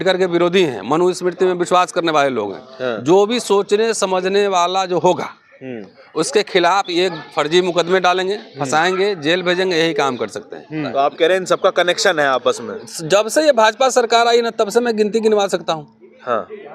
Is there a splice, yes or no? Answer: yes